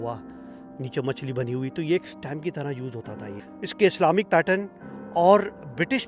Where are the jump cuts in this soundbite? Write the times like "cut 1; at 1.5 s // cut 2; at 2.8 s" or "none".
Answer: cut 1; at 3.3 s